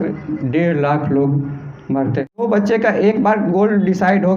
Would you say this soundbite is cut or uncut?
cut